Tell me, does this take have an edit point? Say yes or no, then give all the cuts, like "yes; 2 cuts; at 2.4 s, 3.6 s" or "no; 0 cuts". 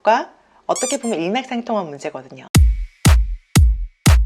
yes; 1 cut; at 2.3 s